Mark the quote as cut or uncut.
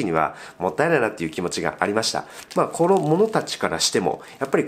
cut